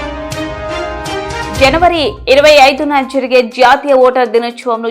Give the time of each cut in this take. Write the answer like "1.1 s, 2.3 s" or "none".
1.5 s